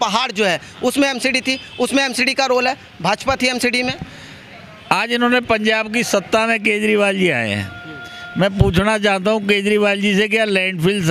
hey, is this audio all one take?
yes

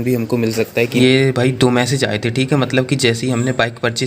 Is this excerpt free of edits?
no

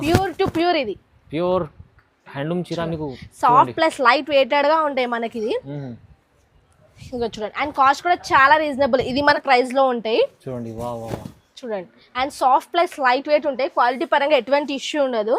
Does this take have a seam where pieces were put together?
yes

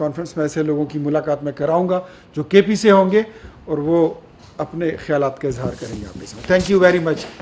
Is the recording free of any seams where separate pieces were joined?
yes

